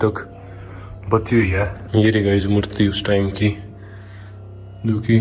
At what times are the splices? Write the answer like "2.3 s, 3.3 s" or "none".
1.8 s